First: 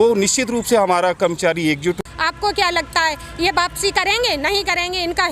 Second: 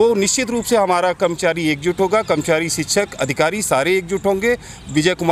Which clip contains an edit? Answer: first; 1 cut; at 2.0 s

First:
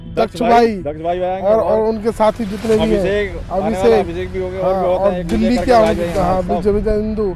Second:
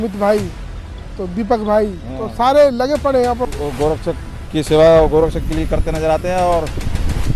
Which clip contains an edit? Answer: second; 1 cut; at 3.5 s

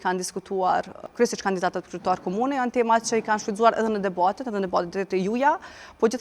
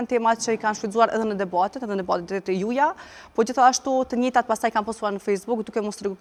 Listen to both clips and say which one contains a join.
first; 1 cut; at 1.0 s

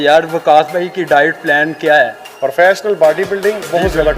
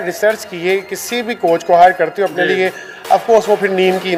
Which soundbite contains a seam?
first; 1 cut; at 2.3 s

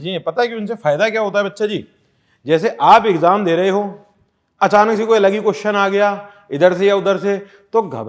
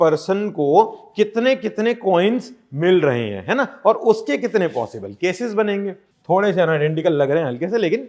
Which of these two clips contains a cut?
second; 1 cut; at 6.1 s

